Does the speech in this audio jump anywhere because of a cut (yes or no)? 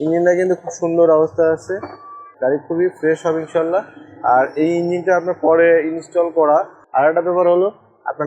yes